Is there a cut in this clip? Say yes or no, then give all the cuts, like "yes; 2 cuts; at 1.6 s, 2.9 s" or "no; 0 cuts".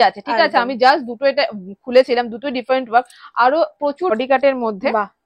yes; 1 cut; at 4.1 s